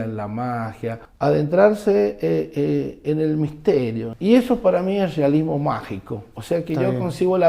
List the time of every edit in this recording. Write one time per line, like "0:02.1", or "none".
0:01.0
0:04.1